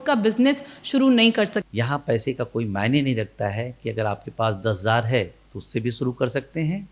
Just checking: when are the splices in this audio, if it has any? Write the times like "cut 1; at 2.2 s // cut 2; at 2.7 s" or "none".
cut 1; at 1.6 s